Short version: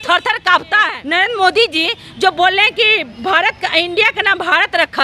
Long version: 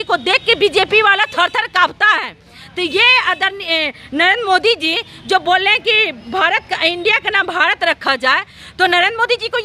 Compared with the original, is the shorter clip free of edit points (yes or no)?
no